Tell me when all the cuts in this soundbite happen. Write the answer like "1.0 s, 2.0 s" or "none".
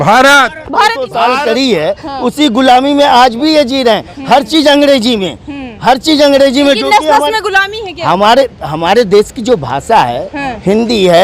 1.1 s

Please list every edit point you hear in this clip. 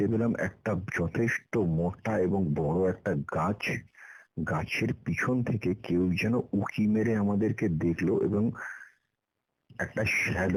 none

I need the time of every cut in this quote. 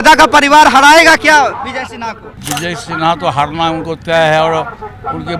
2.3 s

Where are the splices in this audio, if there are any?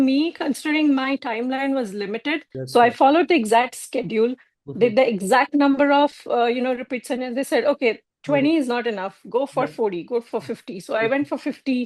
2.5 s

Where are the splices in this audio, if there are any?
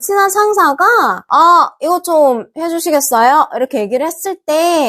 1.2 s

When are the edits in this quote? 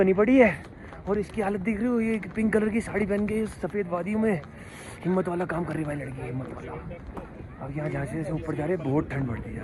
none

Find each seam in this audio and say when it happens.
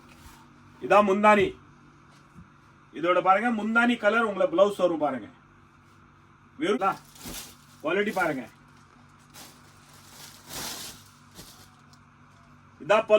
6.8 s

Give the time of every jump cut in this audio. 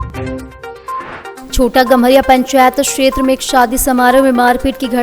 1.4 s

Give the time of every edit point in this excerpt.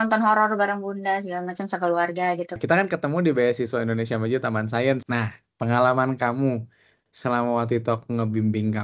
2.6 s, 5.0 s

